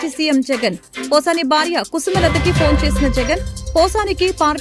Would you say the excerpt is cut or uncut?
uncut